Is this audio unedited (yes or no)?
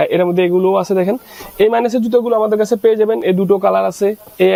yes